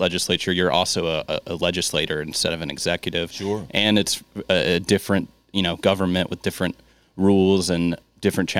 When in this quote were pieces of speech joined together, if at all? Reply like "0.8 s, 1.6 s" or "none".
none